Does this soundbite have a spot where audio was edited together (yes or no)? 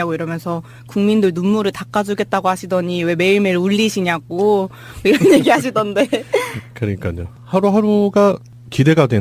yes